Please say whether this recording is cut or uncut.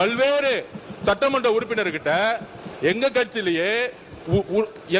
uncut